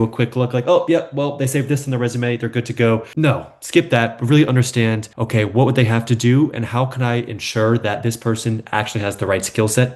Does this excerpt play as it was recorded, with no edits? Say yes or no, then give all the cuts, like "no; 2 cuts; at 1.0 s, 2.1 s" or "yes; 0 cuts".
yes; 0 cuts